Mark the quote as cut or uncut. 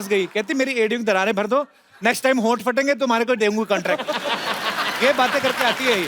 uncut